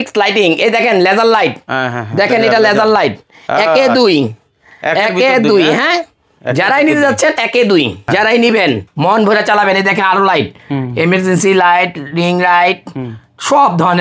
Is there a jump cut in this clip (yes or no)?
yes